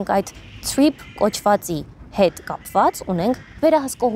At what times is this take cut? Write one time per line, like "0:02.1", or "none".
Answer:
none